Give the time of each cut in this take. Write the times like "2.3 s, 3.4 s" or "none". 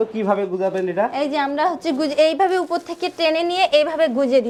none